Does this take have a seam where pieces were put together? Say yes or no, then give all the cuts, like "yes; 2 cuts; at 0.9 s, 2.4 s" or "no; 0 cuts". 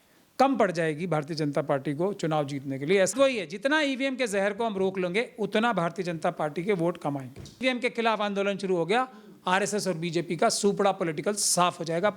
yes; 2 cuts; at 3.1 s, 7.6 s